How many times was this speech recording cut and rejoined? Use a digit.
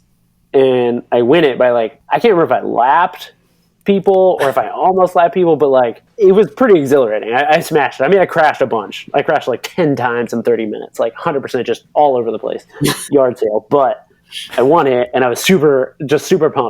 2